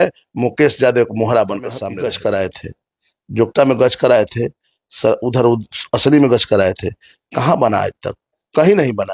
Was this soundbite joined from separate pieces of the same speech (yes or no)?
yes